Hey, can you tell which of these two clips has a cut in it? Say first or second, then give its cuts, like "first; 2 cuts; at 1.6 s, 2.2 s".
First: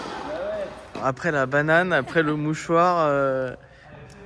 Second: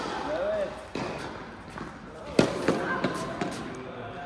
first; 1 cut; at 1.0 s